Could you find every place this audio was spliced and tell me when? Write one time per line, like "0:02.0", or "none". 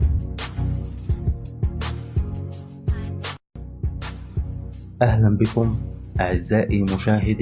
0:03.6